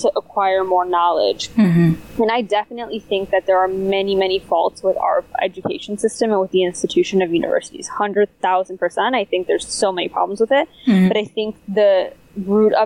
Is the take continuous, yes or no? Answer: yes